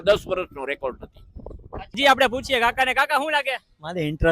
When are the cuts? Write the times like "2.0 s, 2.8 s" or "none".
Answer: 2.0 s

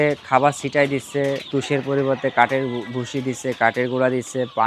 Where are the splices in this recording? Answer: 1.5 s

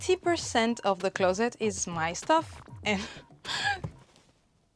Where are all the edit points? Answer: 2.7 s

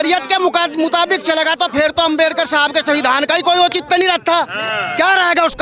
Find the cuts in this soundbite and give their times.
none

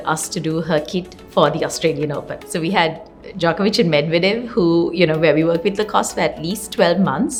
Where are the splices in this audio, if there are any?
none

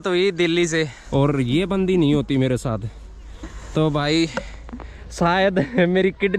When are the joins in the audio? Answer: 1.0 s

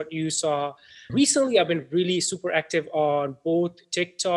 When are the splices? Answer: 1.1 s

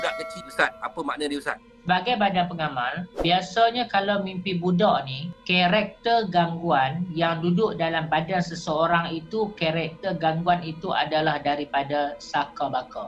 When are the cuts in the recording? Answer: 1.6 s

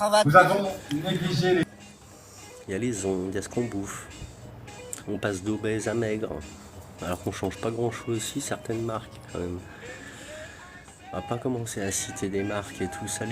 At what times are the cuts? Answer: 1.6 s

